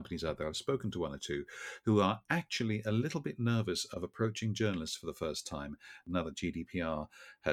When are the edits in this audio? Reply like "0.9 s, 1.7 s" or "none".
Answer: none